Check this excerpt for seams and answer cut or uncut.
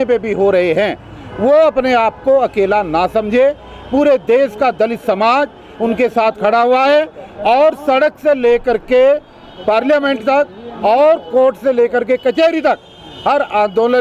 uncut